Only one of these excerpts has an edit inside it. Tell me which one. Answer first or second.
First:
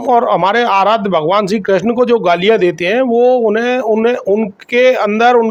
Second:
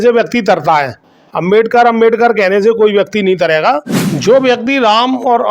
second